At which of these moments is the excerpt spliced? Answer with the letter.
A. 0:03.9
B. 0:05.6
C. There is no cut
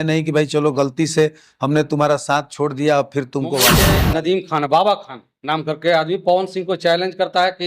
A